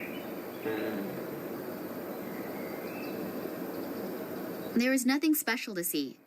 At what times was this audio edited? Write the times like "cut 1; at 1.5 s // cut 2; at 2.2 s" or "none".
cut 1; at 4.7 s